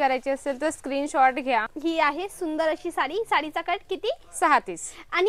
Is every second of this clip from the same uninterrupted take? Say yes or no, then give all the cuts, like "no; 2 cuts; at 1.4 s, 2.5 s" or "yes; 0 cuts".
no; 1 cut; at 1.7 s